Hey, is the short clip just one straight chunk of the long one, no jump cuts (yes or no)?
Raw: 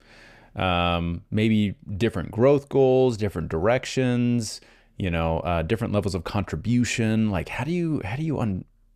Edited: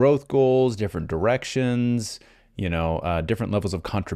yes